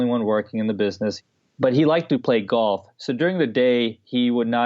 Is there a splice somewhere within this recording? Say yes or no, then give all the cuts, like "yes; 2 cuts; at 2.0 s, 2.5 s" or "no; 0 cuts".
yes; 1 cut; at 1.2 s